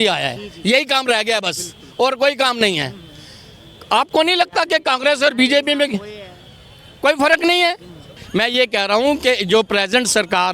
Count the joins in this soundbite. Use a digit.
1